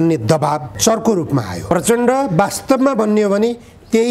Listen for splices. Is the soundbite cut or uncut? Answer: cut